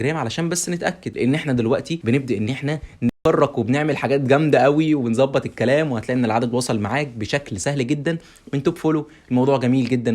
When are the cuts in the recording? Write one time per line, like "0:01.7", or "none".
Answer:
0:01.0
0:01.9